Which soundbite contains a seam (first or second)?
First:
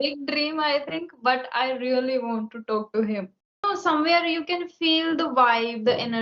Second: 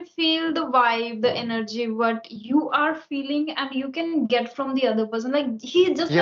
first